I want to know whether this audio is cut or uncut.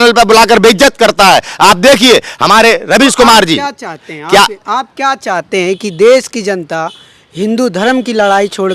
uncut